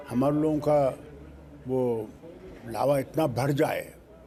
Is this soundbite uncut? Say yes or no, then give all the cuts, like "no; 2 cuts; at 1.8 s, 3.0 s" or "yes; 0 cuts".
yes; 0 cuts